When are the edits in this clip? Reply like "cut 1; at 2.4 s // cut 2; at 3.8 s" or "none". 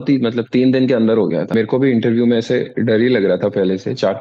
cut 1; at 1.5 s